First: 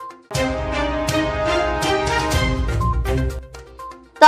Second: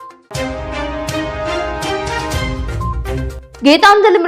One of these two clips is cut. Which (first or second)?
second